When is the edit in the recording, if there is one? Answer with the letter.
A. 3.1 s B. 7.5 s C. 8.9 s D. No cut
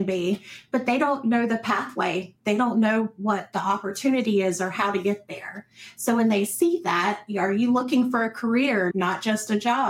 C